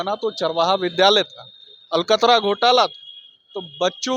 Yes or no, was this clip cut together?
no